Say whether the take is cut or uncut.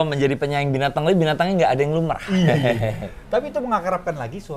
uncut